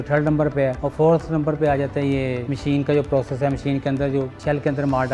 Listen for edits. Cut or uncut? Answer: uncut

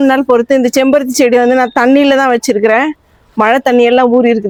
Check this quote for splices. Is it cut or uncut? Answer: uncut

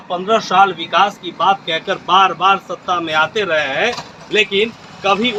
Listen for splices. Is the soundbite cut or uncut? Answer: uncut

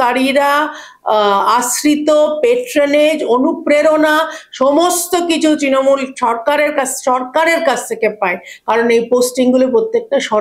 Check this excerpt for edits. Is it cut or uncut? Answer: uncut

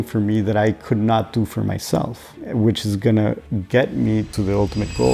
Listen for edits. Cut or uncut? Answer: cut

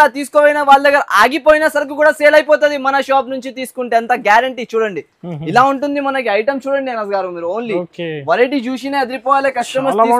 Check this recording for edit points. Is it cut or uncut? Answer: uncut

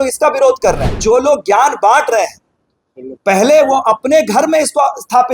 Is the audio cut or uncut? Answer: cut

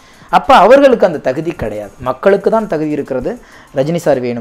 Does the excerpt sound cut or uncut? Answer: uncut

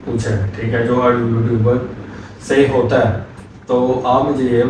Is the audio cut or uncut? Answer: uncut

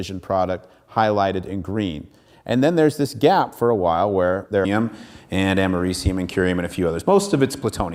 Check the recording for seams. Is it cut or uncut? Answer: uncut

